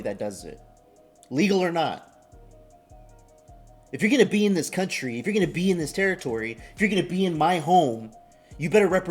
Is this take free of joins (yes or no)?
no